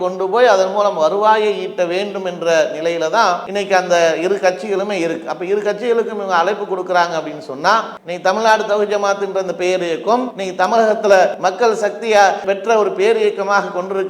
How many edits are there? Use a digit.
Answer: 3